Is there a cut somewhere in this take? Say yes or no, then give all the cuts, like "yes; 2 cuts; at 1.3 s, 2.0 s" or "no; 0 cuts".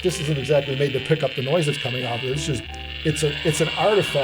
no; 0 cuts